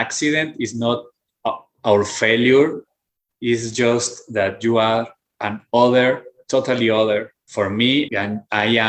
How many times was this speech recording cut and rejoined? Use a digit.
1